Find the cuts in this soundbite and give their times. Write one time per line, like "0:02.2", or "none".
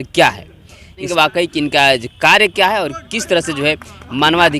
0:01.1